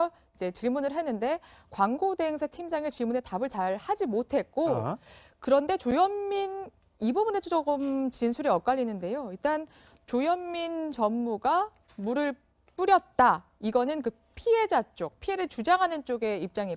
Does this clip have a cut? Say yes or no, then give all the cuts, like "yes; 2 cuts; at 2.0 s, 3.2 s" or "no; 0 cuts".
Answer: no; 0 cuts